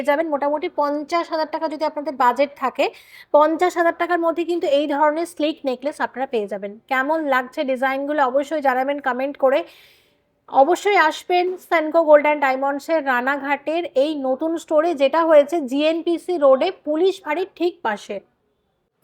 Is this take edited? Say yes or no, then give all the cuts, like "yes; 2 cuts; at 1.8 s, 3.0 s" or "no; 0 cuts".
no; 0 cuts